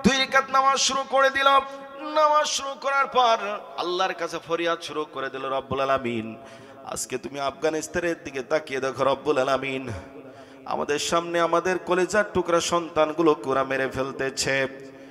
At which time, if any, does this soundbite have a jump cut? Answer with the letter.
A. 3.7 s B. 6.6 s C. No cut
A